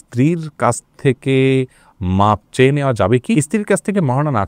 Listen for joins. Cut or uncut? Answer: uncut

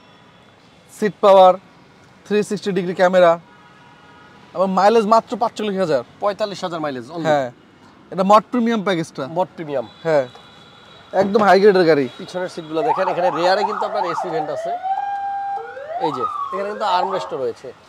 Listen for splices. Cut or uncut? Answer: uncut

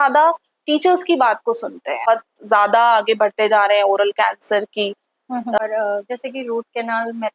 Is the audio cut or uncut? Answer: cut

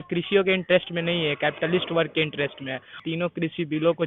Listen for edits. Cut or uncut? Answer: cut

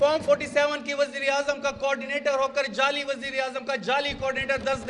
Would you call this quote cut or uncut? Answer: uncut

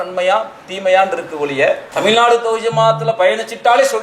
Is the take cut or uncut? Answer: cut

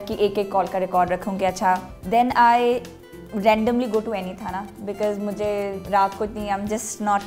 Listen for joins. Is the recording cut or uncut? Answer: cut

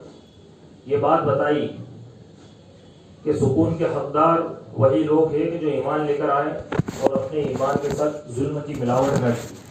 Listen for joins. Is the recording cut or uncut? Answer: uncut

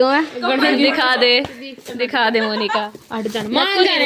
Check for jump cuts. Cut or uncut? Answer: uncut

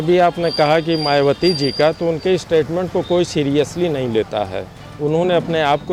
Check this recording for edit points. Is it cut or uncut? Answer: uncut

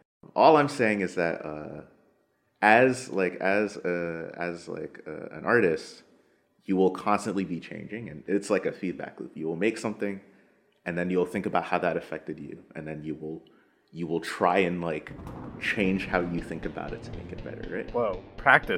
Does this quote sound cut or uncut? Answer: uncut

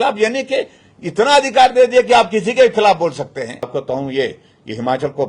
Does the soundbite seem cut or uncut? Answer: cut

